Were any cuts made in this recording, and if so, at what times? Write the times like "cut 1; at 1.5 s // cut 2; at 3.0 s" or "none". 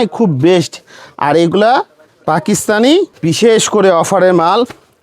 cut 1; at 3.1 s